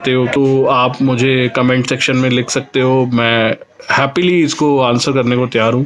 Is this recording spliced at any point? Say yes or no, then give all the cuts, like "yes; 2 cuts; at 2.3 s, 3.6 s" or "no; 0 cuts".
no; 0 cuts